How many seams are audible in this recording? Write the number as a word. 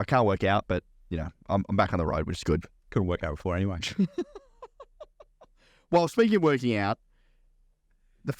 zero